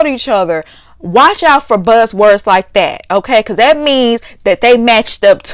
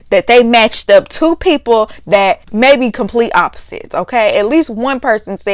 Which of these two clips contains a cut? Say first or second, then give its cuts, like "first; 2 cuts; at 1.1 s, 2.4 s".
second; 1 cut; at 2.5 s